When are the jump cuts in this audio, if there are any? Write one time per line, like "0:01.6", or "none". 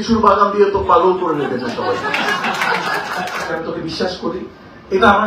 0:03.5